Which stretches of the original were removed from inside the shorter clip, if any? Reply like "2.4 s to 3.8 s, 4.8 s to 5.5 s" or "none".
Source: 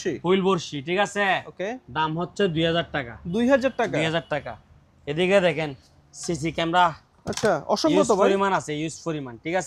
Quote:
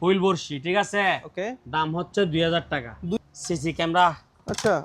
3.4 s to 6.0 s

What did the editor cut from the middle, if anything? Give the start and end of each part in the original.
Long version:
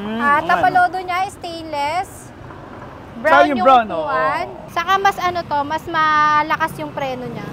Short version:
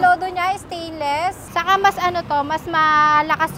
2.2 s to 4.6 s

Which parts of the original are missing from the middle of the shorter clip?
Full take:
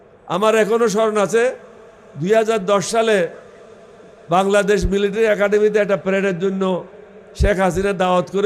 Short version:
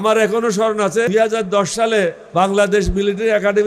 1.4 s to 2.2 s, 3.4 s to 4.2 s

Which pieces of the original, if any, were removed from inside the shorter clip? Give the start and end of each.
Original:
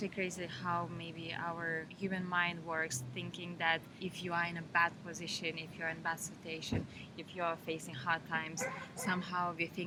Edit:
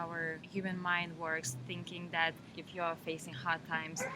3.9 s to 7.0 s

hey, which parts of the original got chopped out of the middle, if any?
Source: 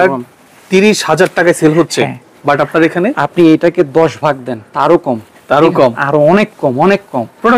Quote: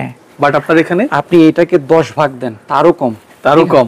none

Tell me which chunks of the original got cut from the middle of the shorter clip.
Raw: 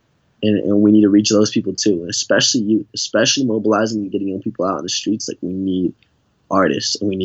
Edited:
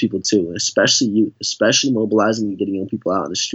none

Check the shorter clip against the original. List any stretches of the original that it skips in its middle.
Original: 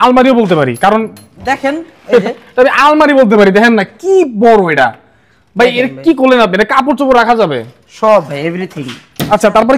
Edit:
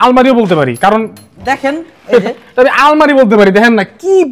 none

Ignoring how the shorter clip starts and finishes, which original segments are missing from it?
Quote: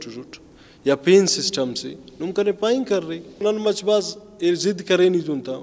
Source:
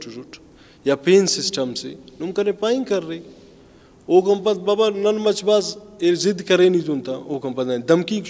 3.4 s to 5.0 s

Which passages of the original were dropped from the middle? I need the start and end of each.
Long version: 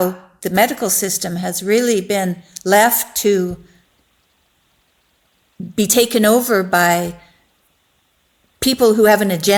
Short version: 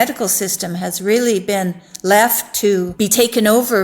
3.5 s to 5.7 s

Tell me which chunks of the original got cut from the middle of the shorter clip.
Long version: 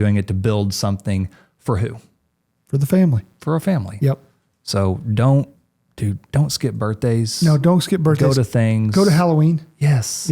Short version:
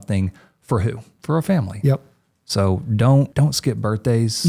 2.1 s to 3.3 s, 5.5 s to 6.3 s

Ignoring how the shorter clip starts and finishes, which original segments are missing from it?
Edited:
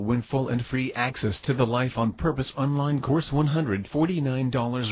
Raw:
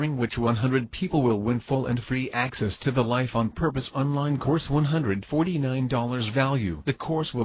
none

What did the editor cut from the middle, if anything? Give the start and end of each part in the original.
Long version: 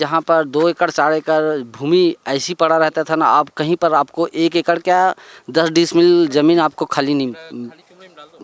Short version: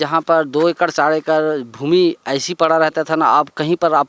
none

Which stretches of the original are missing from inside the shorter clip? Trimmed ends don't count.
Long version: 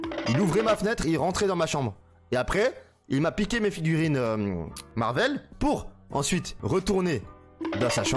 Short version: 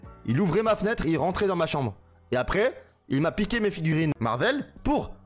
3.9 s to 4.7 s

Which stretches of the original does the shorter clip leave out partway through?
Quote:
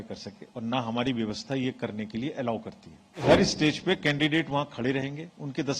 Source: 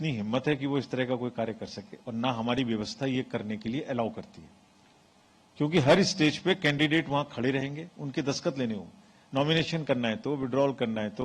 4.8 s to 5.8 s

